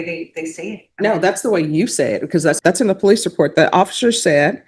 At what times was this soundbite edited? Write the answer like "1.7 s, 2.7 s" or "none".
2.6 s